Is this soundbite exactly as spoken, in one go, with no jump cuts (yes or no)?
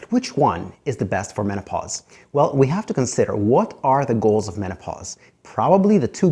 yes